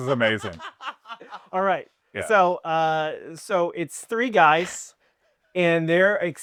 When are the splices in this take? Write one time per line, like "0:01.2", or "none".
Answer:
none